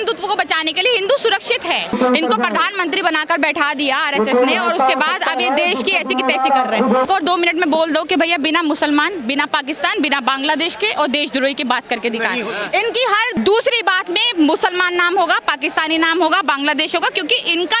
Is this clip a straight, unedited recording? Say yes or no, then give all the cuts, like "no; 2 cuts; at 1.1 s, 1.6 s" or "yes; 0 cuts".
no; 2 cuts; at 1.9 s, 7.1 s